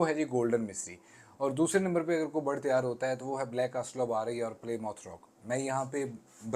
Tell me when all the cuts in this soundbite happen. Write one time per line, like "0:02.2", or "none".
none